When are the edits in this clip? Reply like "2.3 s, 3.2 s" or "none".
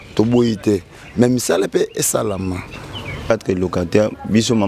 3.3 s